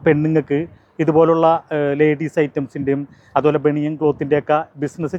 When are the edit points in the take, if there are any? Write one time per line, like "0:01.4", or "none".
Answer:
none